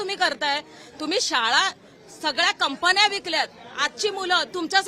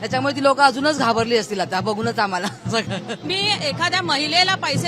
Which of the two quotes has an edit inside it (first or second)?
second